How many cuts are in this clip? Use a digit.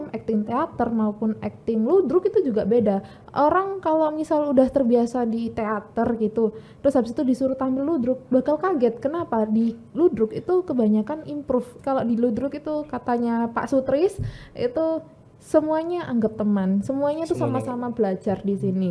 1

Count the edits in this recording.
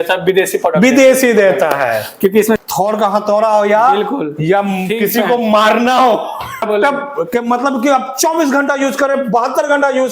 2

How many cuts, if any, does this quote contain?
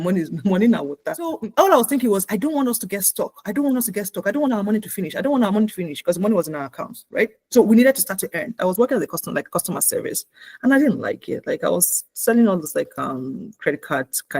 2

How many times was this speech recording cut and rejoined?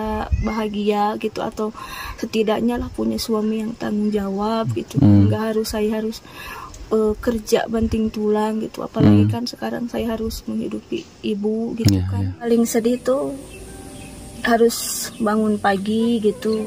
1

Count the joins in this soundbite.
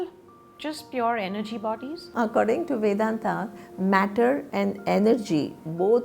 1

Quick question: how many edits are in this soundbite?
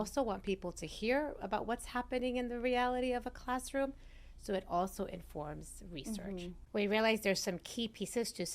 1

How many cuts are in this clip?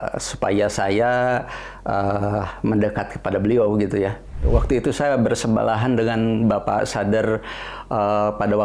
1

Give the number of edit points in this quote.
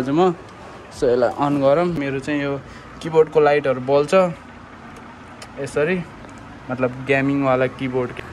1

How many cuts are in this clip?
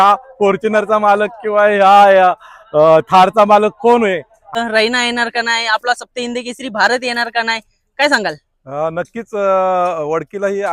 1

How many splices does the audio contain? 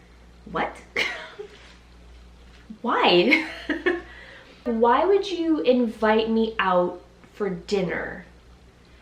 1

